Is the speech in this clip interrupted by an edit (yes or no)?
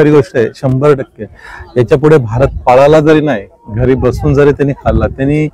no